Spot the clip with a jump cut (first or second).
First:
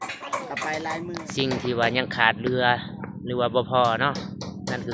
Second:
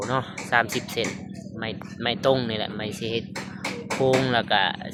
first